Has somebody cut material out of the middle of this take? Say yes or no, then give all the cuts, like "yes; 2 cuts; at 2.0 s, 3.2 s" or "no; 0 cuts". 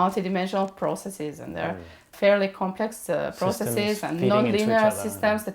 yes; 1 cut; at 2.1 s